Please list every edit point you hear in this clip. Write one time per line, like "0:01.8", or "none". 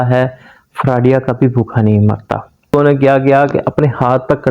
0:02.7